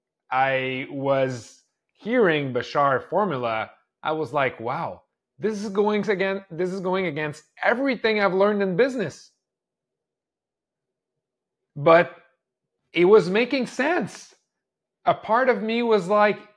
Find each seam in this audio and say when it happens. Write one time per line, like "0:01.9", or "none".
none

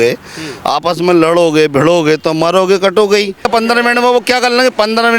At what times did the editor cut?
0:03.5

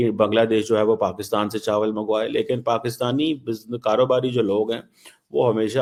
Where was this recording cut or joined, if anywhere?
none

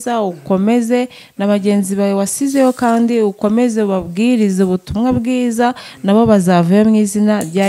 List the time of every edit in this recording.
none

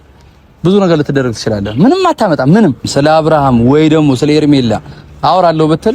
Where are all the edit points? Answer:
0:02.9

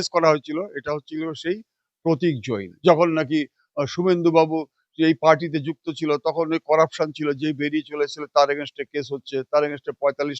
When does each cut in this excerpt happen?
0:02.7

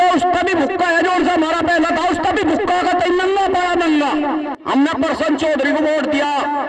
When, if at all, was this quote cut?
0:04.5

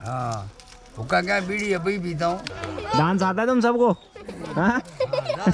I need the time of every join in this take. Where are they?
0:02.5

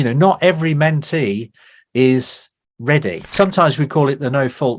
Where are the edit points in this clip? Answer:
0:03.3

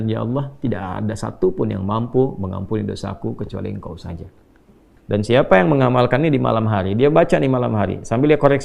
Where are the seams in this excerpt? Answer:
0:04.9

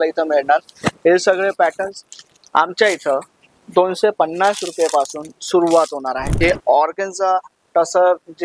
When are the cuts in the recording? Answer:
0:06.3

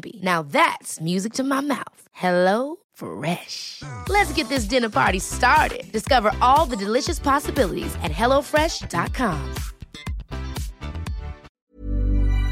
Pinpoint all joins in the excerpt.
0:11.4

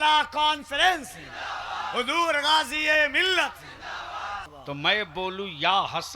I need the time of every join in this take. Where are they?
0:04.5

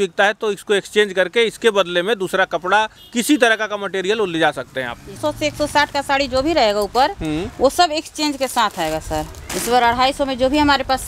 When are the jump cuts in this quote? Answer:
0:05.1
0:09.4

